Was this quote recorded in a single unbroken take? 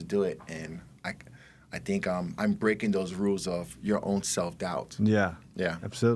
yes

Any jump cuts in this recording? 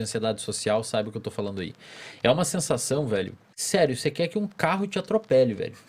yes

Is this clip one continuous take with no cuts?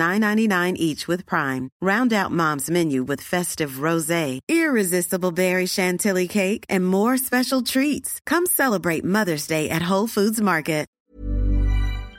no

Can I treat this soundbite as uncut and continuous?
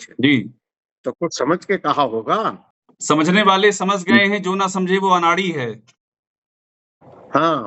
no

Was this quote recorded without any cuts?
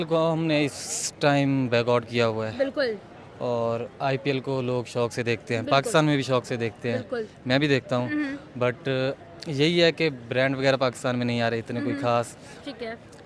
yes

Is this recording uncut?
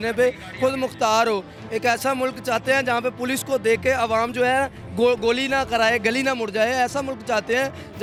yes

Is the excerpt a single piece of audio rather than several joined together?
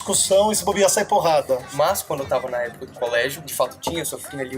no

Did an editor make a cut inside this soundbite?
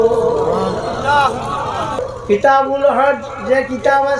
yes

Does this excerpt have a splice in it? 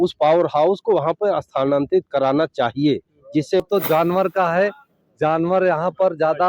yes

